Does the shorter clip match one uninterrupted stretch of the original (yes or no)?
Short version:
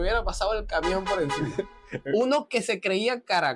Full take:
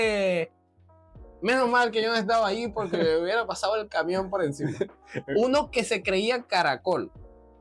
yes